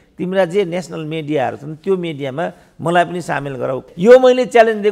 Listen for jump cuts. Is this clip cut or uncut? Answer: cut